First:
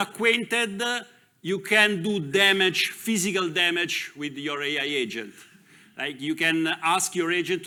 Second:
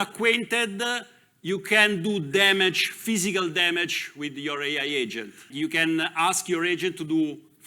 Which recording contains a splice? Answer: second; 1 cut; at 5.5 s

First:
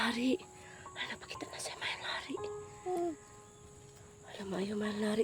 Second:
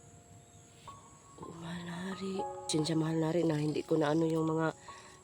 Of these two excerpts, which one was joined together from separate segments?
second; 1 cut; at 2.7 s

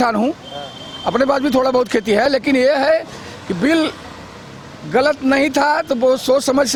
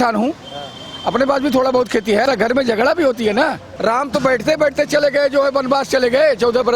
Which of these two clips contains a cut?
second; 2 cuts; at 2.2 s, 3.7 s

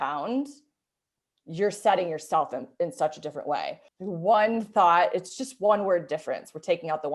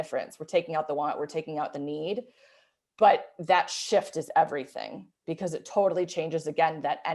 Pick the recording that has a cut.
first; 1 cut; at 3.9 s

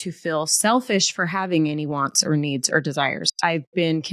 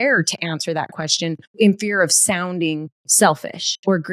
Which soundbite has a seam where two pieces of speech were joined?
second; 2 cuts; at 1.5 s, 3.0 s

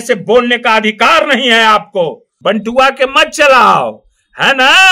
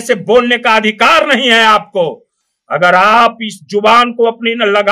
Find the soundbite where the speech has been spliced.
first; 1 cut; at 2.3 s

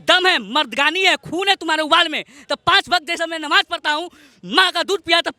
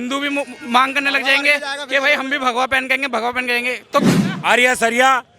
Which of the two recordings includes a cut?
second; 1 cut; at 4.1 s

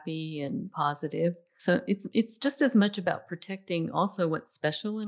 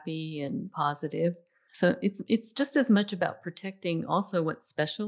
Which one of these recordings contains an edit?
first; 1 cut; at 1.5 s

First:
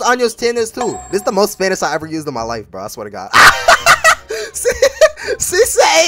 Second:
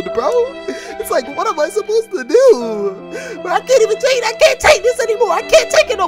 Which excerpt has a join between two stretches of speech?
second; 1 cut; at 3.1 s

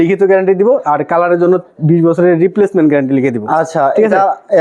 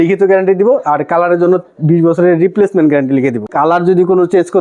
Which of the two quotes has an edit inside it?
second; 1 cut; at 3.5 s

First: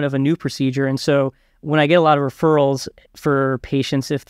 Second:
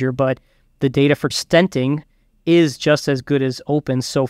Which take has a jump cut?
second; 1 cut; at 1.3 s

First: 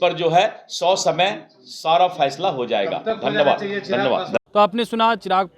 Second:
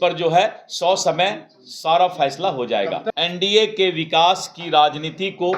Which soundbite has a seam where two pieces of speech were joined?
second; 1 cut; at 3.1 s

